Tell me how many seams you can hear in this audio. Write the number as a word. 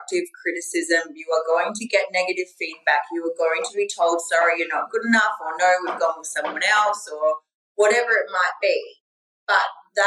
zero